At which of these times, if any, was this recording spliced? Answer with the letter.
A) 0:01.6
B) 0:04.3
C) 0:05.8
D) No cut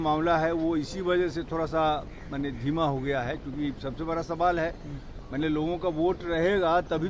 D